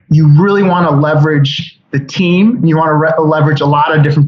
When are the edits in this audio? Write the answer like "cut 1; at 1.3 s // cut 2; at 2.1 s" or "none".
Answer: none